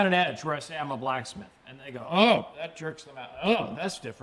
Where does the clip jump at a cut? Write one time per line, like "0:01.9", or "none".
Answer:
none